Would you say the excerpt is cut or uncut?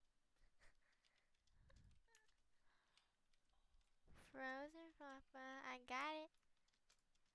cut